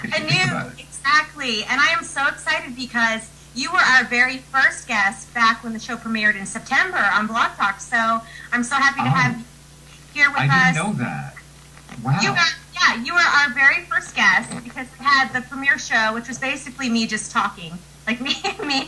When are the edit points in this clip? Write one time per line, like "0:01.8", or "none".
0:12.6

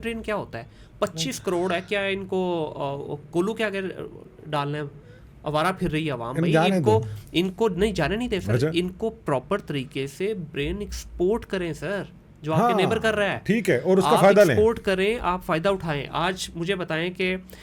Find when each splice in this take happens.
none

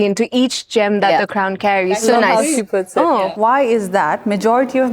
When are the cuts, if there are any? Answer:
0:03.3

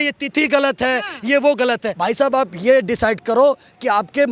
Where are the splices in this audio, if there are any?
0:01.9

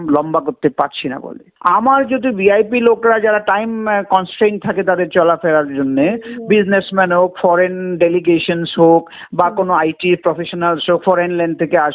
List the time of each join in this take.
0:01.5

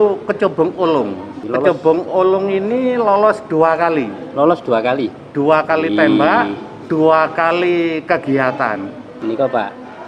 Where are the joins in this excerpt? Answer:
0:01.4
0:09.1

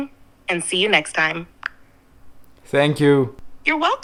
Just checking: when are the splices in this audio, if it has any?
none

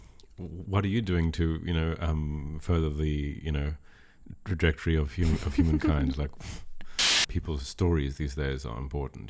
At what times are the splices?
0:07.2

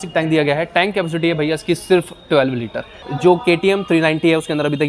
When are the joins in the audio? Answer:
0:03.1

